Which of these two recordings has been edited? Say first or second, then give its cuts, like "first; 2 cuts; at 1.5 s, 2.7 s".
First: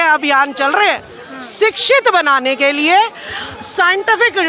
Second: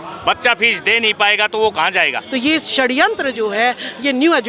second; 1 cut; at 2.2 s